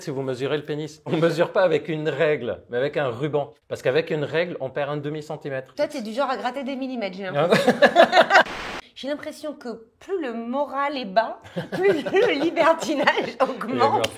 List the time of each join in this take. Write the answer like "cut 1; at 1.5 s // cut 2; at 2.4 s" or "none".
cut 1; at 1.1 s // cut 2; at 5.7 s // cut 3; at 8.5 s